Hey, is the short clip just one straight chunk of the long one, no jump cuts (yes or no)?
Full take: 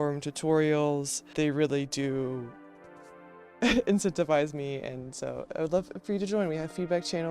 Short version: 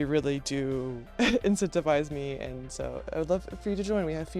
no